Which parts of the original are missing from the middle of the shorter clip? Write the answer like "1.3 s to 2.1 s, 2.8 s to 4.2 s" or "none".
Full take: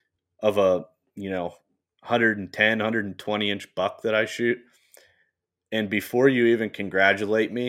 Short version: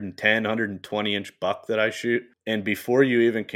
4.7 s to 5.6 s